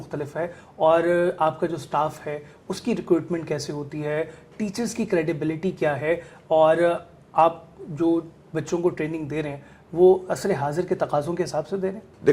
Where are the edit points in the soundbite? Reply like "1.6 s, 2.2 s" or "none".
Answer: none